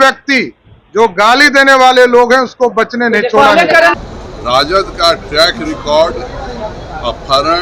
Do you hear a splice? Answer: yes; 1 cut; at 4.0 s

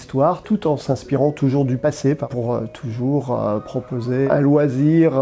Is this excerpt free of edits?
no; 2 cuts; at 2.2 s, 4.3 s

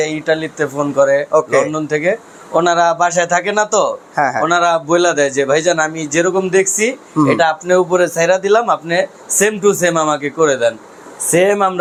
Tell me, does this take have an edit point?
no; 0 cuts

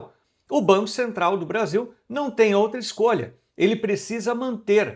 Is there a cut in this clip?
no; 0 cuts

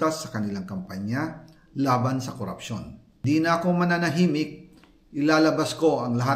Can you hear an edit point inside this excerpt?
yes; 1 cut; at 3.2 s

